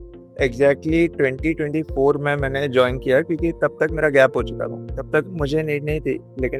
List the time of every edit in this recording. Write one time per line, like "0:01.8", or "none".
none